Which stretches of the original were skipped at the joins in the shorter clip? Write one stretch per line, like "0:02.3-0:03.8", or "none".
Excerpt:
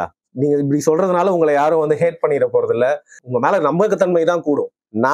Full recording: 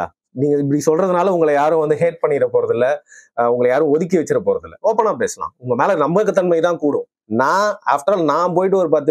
0:03.1-0:05.5